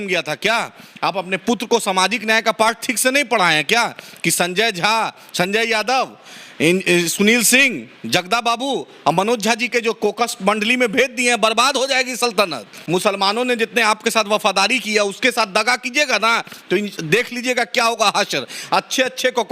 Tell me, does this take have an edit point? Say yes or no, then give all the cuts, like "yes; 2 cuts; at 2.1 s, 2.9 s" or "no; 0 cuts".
yes; 1 cut; at 12.7 s